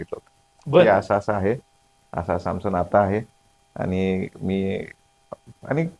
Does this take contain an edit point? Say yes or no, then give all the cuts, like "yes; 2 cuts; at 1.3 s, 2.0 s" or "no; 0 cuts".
no; 0 cuts